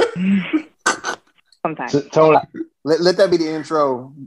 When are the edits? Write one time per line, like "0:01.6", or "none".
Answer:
0:02.4